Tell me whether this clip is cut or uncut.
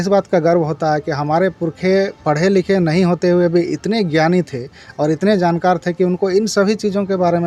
uncut